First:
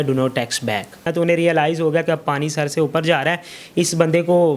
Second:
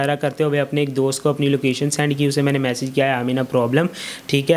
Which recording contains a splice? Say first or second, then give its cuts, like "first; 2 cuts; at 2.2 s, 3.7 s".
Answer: first; 1 cut; at 1.1 s